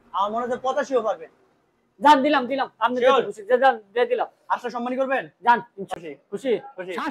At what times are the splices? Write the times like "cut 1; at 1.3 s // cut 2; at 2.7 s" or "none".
cut 1; at 5.9 s